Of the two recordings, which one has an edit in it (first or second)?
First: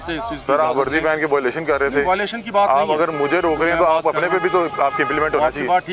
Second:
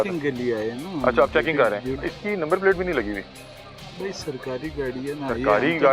second